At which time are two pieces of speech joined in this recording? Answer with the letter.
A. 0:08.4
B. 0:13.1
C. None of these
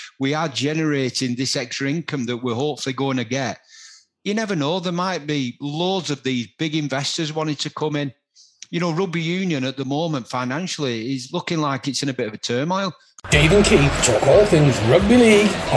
B